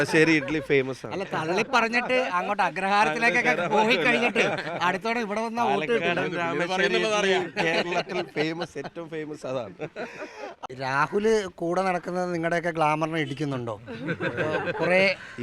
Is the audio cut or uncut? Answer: cut